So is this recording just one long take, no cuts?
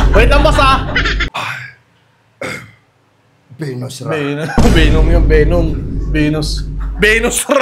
no; 1 cut; at 1.1 s

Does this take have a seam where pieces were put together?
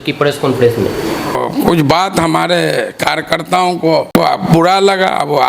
yes; 2 cuts; at 1.3 s, 4.1 s

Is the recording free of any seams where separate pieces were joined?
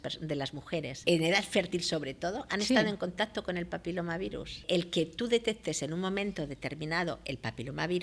no; 2 cuts; at 1.0 s, 4.6 s

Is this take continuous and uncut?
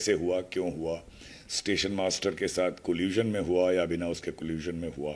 yes; 0 cuts

